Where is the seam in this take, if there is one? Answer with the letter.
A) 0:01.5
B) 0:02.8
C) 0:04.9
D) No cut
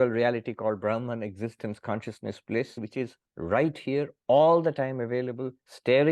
B